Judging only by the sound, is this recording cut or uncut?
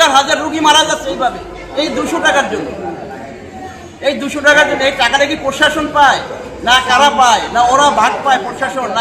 uncut